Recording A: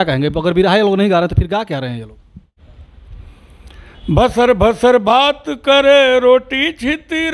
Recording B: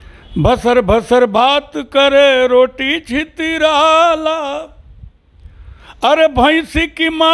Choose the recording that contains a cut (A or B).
A